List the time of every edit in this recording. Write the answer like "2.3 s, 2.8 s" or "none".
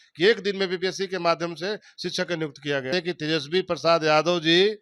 2.9 s